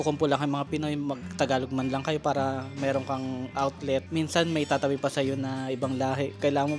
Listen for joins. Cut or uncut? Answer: cut